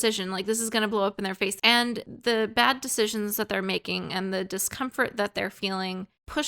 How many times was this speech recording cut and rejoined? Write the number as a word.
one